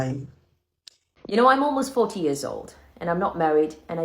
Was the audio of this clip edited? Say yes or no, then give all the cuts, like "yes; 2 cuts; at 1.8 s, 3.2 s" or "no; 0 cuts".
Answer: yes; 1 cut; at 1.4 s